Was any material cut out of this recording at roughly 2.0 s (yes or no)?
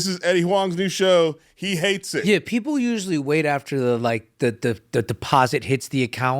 yes